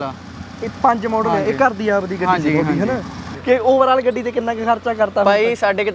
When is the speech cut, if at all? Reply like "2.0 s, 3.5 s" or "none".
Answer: 3.3 s